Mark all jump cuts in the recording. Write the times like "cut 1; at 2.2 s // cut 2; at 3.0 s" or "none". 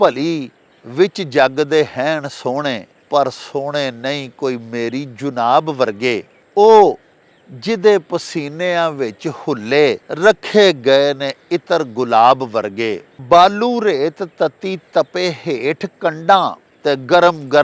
cut 1; at 2.9 s // cut 2; at 6.4 s // cut 3; at 10.1 s // cut 4; at 13.1 s // cut 5; at 16.7 s